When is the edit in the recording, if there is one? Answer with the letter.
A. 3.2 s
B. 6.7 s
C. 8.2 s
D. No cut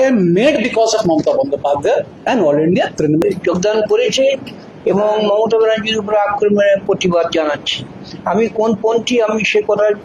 A